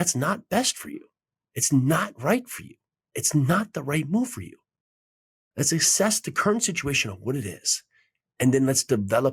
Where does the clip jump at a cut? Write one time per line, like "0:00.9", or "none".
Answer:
none